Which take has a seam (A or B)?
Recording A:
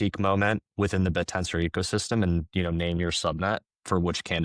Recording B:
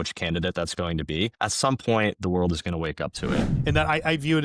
B